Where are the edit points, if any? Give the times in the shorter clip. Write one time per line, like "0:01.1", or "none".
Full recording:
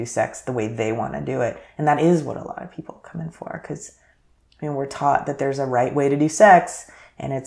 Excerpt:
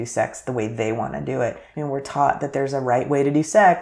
0:01.6